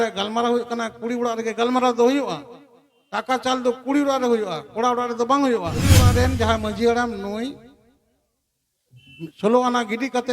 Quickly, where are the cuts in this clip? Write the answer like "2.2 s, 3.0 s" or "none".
6.0 s